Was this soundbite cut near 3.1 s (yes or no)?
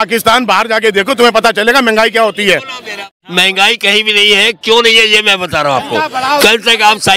yes